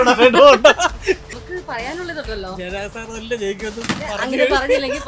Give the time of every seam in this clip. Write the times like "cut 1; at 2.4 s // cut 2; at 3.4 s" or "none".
cut 1; at 1.2 s